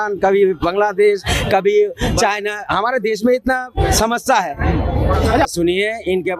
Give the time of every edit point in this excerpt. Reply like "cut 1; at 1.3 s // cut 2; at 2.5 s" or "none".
cut 1; at 5.5 s

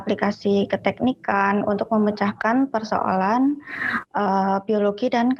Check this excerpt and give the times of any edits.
none

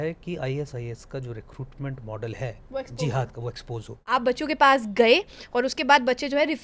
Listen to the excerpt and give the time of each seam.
cut 1; at 3.9 s

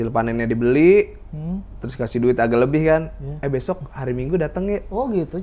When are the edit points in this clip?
none

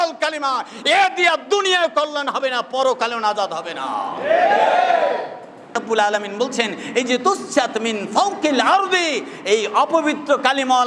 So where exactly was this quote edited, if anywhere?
cut 1; at 5.7 s

